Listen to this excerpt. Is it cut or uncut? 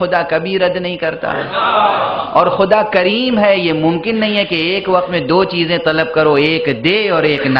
uncut